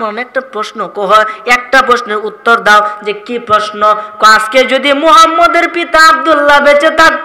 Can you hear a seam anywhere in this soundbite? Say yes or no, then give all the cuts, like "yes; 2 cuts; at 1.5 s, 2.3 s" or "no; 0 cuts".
no; 0 cuts